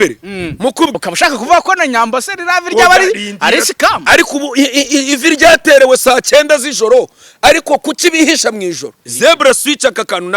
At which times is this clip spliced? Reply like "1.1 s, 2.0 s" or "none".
0.9 s, 9.0 s